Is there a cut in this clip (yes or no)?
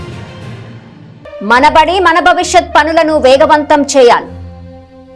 no